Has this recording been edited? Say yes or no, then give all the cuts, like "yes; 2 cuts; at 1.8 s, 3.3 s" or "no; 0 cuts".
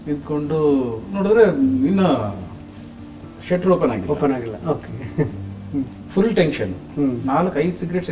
no; 0 cuts